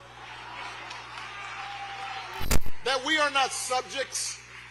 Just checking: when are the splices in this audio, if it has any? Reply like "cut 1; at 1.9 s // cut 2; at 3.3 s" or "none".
cut 1; at 2.5 s

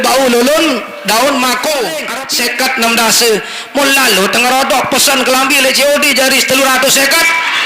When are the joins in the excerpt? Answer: cut 1; at 2.1 s

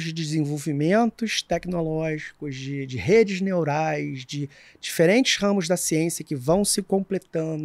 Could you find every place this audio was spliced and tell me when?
none

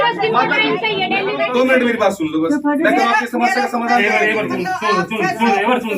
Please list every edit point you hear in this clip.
cut 1; at 1.4 s

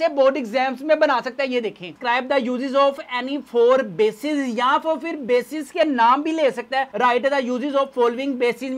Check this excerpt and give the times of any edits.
cut 1; at 1.9 s

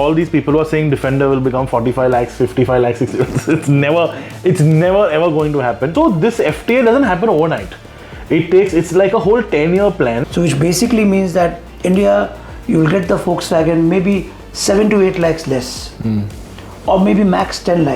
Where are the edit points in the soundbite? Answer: cut 1; at 5.9 s // cut 2; at 10.2 s

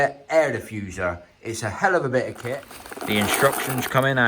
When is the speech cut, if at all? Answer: cut 1; at 2.5 s

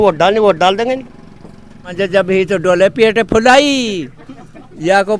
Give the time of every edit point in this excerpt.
cut 1; at 1.9 s

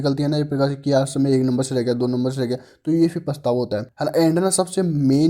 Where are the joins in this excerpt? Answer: cut 1; at 3.9 s

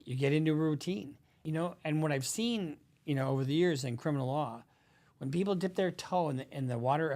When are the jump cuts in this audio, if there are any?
cut 1; at 1.4 s

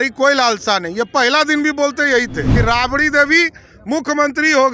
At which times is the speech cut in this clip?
cut 1; at 2.5 s

